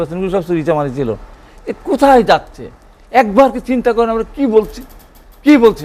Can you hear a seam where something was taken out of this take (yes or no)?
no